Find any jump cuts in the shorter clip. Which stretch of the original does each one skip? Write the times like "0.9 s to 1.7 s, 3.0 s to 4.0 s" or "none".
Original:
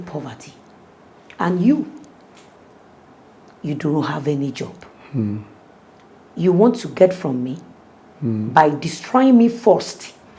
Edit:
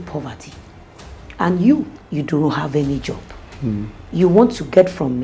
2.0 s to 3.5 s, 5.5 s to 6.2 s